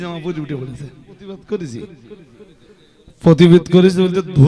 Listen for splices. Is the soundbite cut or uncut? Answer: cut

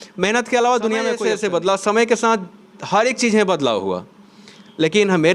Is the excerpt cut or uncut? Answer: cut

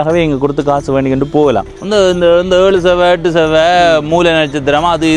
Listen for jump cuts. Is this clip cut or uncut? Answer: cut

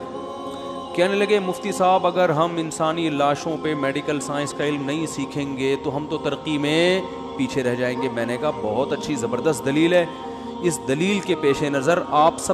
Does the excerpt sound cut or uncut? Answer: uncut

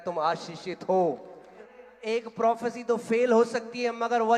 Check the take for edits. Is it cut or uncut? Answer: cut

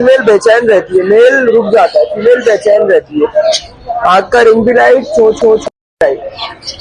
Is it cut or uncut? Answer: uncut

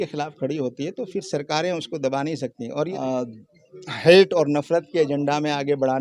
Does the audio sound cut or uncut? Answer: cut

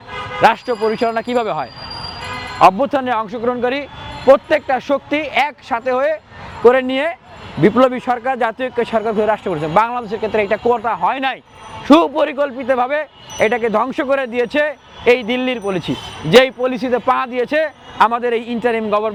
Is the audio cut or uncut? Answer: uncut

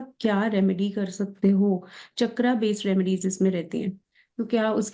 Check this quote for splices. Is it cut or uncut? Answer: uncut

